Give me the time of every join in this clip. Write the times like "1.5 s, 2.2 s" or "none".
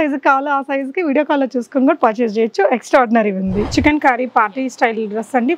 3.6 s